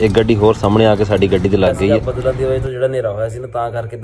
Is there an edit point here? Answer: yes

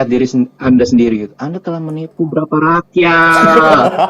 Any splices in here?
no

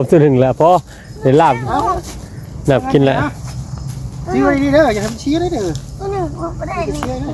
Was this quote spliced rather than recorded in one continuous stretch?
no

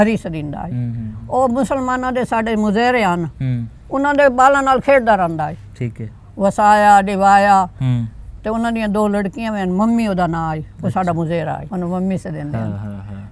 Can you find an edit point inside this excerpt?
no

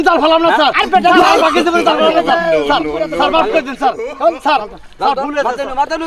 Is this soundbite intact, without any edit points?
yes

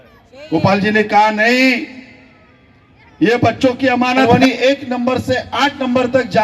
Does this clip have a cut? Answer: yes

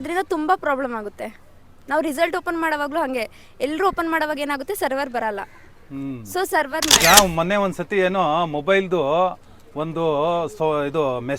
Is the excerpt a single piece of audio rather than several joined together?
no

